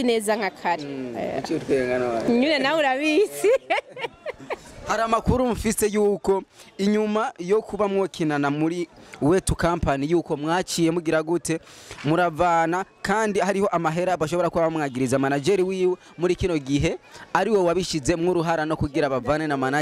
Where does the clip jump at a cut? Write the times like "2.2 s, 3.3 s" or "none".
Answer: none